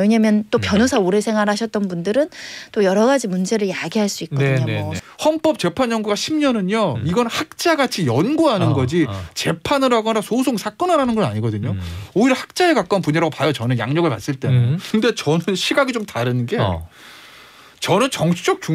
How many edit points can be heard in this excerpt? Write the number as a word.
two